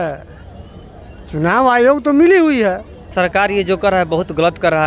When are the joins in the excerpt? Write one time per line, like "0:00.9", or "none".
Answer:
0:03.0